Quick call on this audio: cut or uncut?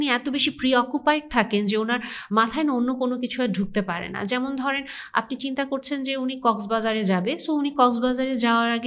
uncut